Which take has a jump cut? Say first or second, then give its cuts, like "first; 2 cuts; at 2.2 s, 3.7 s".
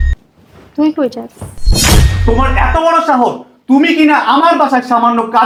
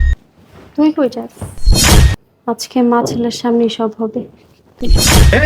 second; 1 cut; at 2.1 s